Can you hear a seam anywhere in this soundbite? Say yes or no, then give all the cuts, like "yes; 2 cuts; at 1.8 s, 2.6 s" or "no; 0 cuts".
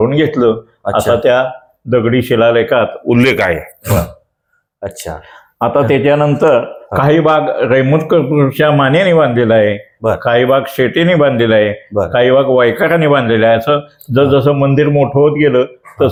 no; 0 cuts